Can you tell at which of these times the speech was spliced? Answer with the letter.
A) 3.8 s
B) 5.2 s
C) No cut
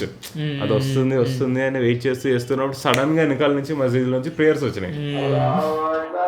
B